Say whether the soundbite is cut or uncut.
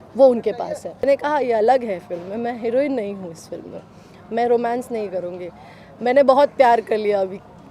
cut